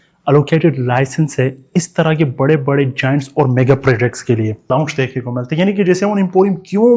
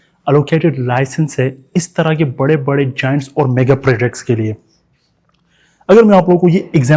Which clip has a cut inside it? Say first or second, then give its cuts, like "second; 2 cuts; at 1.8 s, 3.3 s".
first; 1 cut; at 4.7 s